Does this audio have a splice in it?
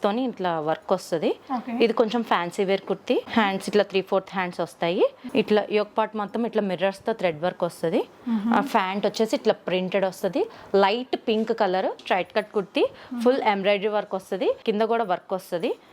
yes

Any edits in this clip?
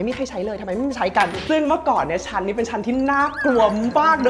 yes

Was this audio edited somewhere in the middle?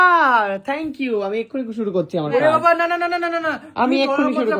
no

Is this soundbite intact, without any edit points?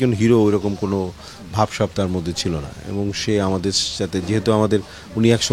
yes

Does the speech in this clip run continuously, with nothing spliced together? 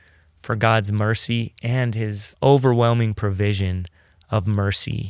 no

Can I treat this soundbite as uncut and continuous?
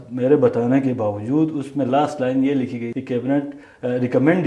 no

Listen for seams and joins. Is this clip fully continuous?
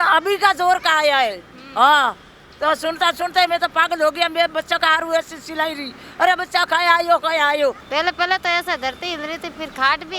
no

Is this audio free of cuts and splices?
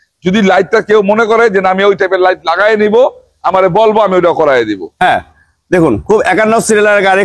yes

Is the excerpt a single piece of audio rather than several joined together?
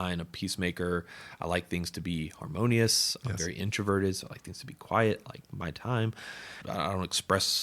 no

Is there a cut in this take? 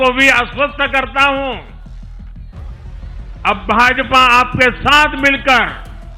yes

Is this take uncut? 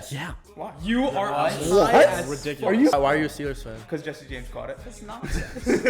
no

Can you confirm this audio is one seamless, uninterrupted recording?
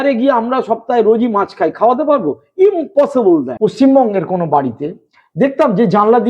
no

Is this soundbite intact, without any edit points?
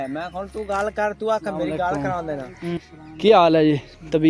no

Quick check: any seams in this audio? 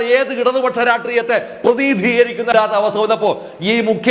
yes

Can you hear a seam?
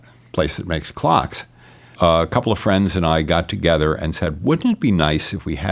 yes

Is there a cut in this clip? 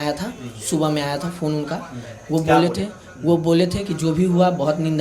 no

